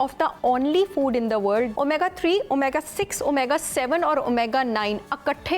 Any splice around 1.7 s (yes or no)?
yes